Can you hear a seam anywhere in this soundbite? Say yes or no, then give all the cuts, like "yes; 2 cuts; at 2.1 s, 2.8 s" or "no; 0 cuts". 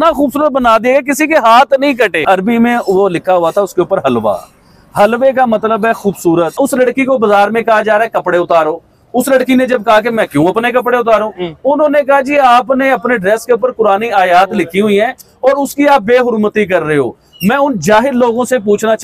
yes; 2 cuts; at 2.2 s, 6.6 s